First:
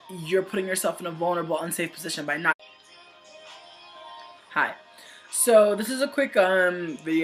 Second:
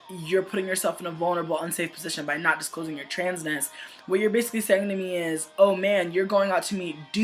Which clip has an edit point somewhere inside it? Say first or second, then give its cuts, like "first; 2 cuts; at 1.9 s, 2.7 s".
second; 1 cut; at 2.6 s